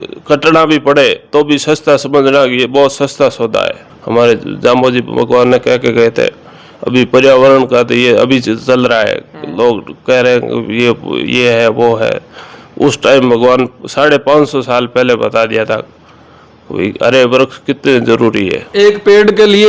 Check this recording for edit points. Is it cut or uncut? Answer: uncut